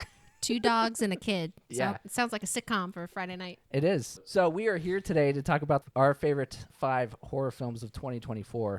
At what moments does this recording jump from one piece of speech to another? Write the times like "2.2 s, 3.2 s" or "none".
4.2 s, 5.9 s, 6.7 s